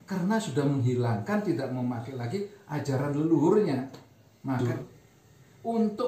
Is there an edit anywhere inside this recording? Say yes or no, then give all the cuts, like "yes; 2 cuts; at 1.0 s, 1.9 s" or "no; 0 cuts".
yes; 1 cut; at 4.6 s